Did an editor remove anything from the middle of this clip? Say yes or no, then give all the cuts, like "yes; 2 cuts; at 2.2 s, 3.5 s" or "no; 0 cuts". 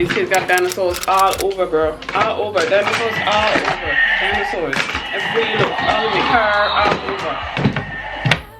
no; 0 cuts